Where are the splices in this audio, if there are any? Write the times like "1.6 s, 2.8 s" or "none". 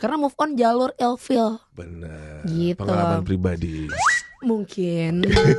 none